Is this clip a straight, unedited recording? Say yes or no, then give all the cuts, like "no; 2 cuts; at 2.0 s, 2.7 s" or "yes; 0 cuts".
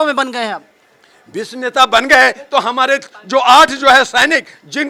yes; 0 cuts